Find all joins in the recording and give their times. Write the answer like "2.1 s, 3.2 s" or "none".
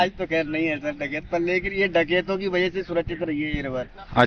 none